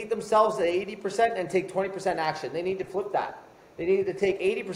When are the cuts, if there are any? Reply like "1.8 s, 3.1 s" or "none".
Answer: none